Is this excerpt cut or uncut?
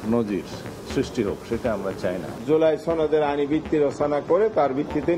cut